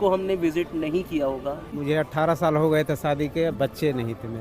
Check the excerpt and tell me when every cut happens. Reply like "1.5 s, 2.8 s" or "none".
1.6 s